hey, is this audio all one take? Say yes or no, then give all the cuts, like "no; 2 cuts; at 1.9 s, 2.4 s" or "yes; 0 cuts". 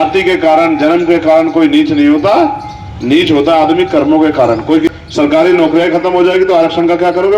no; 1 cut; at 4.9 s